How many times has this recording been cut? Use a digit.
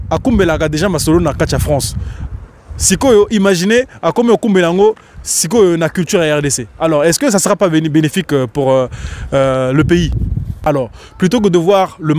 1